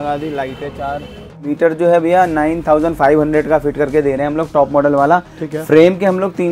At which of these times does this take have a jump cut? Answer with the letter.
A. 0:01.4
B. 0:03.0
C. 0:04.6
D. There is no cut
A